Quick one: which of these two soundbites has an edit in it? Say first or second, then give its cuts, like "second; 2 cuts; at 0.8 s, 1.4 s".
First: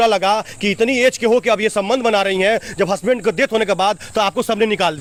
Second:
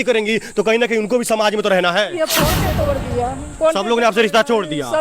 second; 1 cut; at 2.6 s